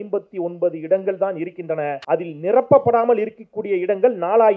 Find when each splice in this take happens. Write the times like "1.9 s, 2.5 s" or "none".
2.0 s